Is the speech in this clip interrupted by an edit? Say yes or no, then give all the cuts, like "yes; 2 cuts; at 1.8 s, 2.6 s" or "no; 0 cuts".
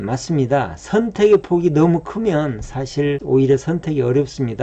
yes; 1 cut; at 3.2 s